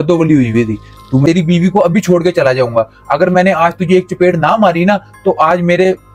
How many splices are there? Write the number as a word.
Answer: one